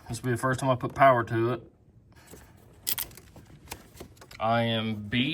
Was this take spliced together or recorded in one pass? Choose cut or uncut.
cut